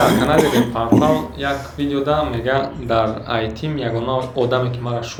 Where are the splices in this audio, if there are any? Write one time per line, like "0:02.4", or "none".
none